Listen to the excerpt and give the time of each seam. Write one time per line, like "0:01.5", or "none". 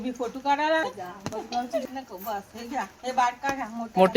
0:01.9